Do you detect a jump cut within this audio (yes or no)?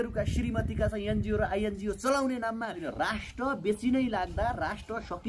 yes